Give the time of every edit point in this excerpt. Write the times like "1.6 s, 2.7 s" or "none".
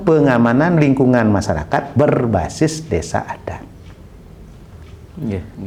none